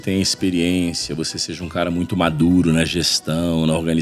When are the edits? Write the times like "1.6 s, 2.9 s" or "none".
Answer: none